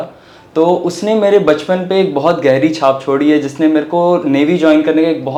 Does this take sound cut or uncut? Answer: uncut